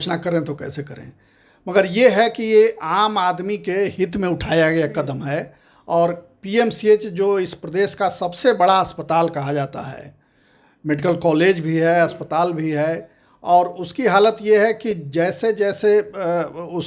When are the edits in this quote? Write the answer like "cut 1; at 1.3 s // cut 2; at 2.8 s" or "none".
none